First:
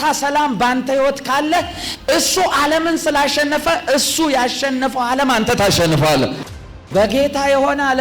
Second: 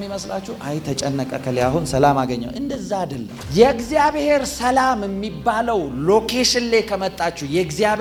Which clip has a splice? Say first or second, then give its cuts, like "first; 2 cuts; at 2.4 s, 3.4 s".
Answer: first; 1 cut; at 6.8 s